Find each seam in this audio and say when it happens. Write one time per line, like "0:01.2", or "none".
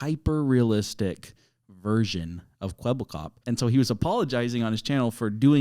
0:03.4